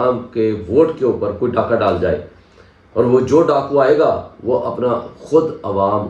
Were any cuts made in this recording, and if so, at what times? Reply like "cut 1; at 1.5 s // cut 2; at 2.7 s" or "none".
none